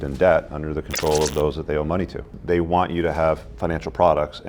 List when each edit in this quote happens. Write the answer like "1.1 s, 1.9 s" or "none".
2.3 s, 3.5 s